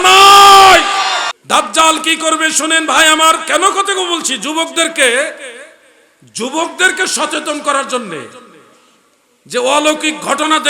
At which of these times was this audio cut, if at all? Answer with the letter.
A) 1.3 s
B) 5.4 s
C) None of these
A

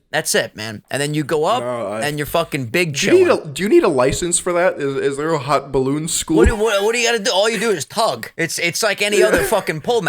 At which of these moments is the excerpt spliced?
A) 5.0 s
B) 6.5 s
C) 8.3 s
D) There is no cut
C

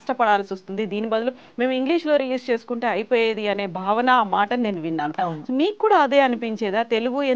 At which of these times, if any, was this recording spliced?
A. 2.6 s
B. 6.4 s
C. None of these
C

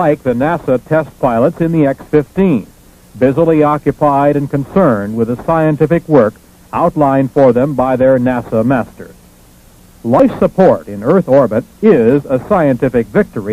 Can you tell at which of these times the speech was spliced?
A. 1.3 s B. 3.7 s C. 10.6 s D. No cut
D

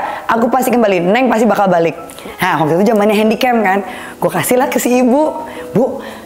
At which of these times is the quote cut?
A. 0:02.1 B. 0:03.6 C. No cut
A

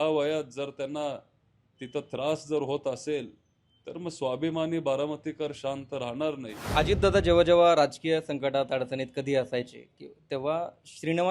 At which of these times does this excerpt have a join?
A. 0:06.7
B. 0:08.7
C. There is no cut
A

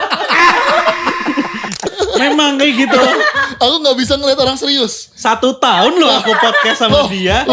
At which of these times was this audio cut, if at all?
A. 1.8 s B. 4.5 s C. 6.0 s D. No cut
A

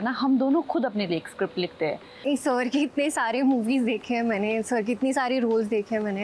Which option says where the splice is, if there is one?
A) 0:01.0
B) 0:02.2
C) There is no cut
B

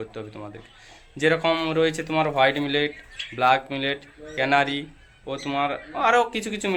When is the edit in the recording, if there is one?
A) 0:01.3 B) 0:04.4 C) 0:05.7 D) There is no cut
D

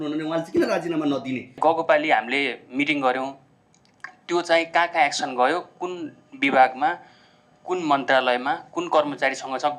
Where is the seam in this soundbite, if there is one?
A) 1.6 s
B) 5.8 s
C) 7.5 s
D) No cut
A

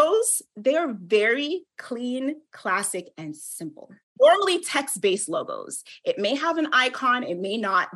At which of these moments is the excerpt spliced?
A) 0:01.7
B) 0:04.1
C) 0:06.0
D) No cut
B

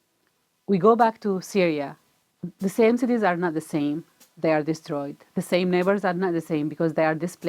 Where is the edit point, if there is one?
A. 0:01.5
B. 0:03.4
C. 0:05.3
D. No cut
D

